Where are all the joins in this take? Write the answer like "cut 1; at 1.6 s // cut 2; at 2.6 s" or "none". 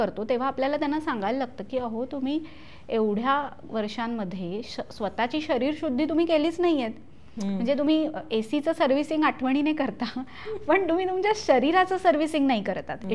none